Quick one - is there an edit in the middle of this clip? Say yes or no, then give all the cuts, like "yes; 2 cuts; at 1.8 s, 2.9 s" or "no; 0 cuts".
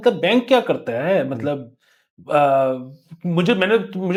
no; 0 cuts